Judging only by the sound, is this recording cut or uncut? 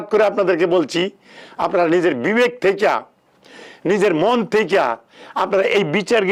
uncut